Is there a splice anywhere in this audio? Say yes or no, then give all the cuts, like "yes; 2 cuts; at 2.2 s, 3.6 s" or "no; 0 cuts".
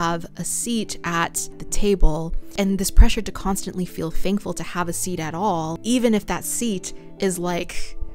no; 0 cuts